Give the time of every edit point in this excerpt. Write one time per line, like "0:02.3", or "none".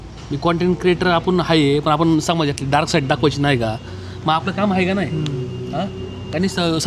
none